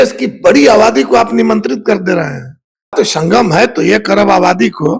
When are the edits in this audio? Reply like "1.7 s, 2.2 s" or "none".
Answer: 2.9 s

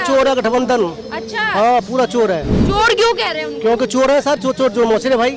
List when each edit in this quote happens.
none

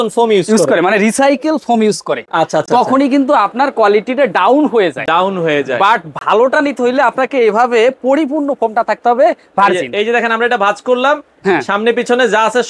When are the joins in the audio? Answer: none

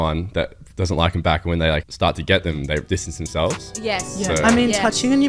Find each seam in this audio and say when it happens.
1.9 s, 2.8 s

